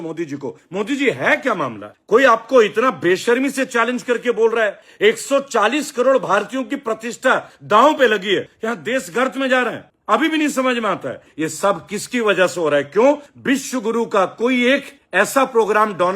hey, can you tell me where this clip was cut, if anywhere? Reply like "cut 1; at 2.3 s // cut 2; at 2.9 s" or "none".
cut 1; at 8.5 s // cut 2; at 11.2 s